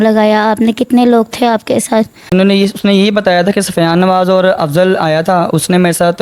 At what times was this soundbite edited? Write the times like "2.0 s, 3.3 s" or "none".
2.3 s